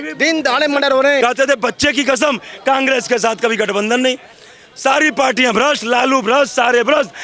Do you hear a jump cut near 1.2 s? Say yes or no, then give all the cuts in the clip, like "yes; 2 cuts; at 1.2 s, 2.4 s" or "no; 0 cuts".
yes; 1 cut; at 1.2 s